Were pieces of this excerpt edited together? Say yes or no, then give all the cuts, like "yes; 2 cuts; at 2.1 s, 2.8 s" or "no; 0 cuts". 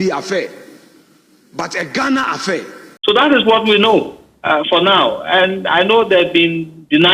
yes; 1 cut; at 2.9 s